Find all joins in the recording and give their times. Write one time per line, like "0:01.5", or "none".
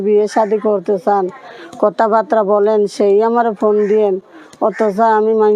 none